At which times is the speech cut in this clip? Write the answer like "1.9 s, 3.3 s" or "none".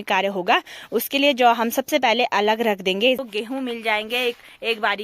3.2 s